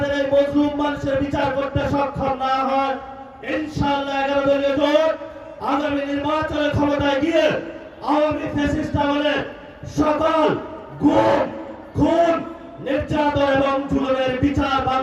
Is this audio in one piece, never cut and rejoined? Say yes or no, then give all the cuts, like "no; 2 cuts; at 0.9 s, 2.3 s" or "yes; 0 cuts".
yes; 0 cuts